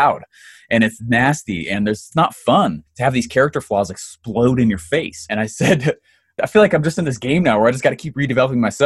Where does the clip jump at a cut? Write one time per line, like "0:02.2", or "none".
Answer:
0:02.1
0:02.9
0:05.3
0:06.4